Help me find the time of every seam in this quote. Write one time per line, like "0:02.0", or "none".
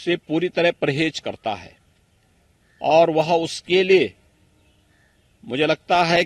none

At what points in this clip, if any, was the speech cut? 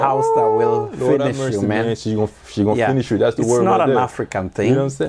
none

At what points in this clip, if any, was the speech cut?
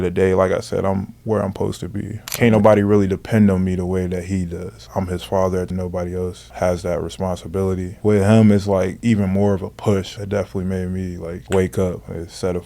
0:02.3
0:05.7
0:07.9
0:10.2

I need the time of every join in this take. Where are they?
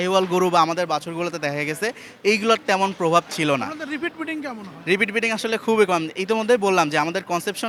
none

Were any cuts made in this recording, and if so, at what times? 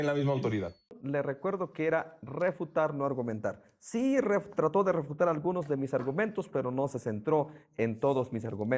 0:01.0

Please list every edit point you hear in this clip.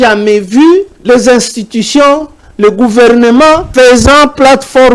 0:00.9
0:03.7

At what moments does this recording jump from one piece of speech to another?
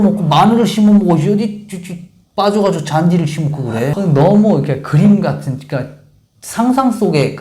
0:03.9

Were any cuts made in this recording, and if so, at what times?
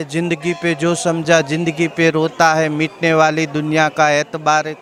none

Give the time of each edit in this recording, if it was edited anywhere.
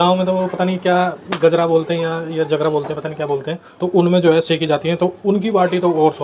none

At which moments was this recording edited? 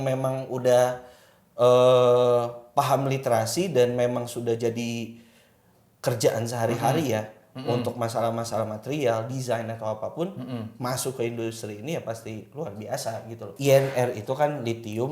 0:13.4

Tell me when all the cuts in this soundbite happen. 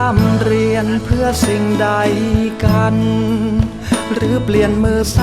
none

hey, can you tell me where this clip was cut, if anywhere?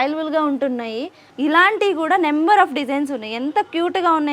0:01.2

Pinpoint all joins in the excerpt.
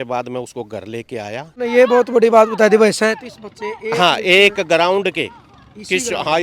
0:01.5

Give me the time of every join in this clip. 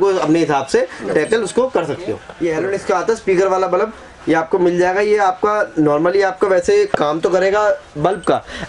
0:02.2

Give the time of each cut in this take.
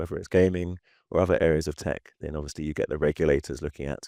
none

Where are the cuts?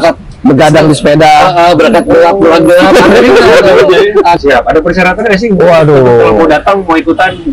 0:04.4

